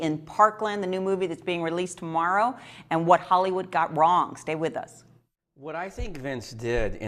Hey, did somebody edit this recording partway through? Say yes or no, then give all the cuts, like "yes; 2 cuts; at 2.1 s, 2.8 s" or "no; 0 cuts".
no; 0 cuts